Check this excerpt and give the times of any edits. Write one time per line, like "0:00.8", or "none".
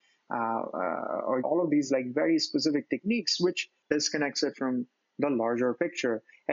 0:01.4
0:03.8

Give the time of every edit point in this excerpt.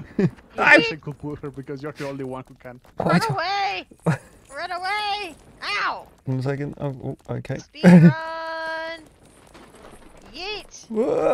none

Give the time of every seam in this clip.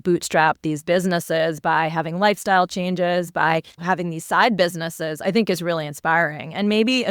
0:03.8

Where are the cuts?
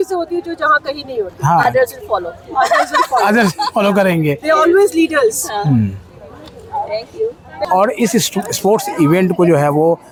none

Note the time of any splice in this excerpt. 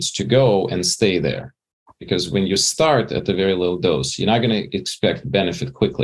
0:01.9

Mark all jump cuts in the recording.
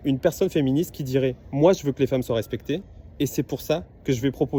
none

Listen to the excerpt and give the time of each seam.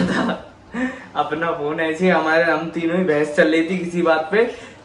none

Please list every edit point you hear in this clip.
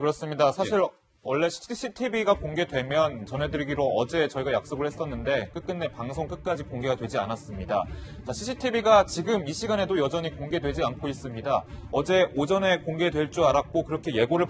0:10.2

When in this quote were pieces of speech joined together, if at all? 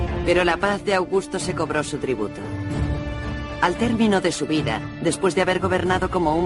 0:02.2

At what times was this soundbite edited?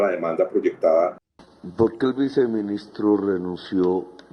0:01.2

